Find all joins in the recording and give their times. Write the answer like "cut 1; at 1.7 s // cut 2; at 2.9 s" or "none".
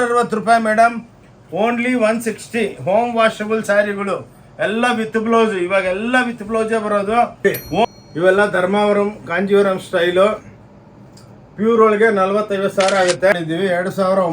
cut 1; at 7.6 s // cut 2; at 13.3 s

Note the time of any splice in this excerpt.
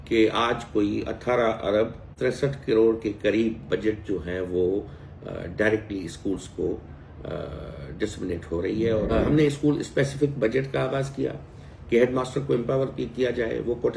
cut 1; at 2.0 s // cut 2; at 9.1 s

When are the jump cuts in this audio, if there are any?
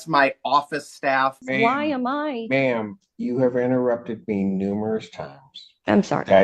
cut 1; at 1.4 s

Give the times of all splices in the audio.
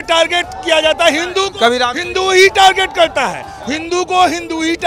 none

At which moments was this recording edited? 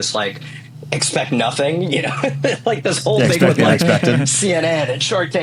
none

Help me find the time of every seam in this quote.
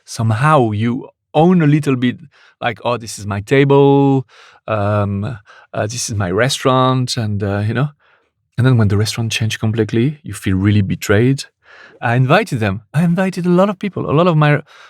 cut 1; at 12.0 s

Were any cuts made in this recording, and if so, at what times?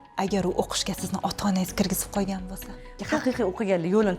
cut 1; at 3.0 s

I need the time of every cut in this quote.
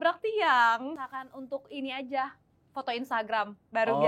cut 1; at 1.0 s

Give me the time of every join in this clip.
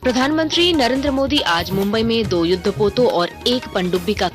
none

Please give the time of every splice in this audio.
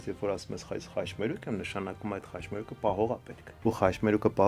cut 1; at 3.5 s

